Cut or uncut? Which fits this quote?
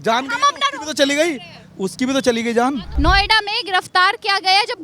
cut